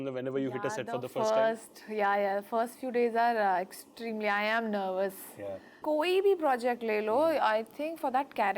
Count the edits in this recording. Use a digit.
1